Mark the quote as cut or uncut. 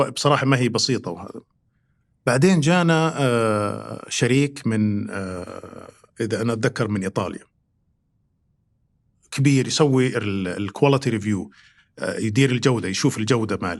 uncut